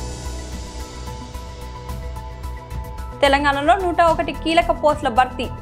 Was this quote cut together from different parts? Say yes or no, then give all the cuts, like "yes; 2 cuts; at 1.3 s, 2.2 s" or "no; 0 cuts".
no; 0 cuts